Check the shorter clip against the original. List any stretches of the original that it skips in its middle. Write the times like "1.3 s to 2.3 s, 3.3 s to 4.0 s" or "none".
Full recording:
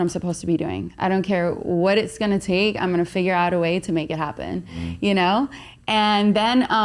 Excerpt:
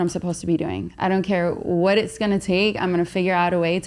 none